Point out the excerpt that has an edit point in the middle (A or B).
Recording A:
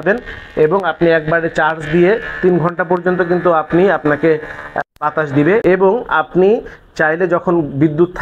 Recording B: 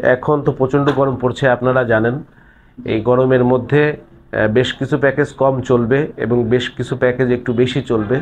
A